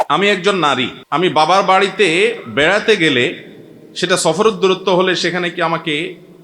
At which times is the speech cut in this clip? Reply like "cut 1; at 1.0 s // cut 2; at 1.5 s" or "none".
cut 1; at 1.0 s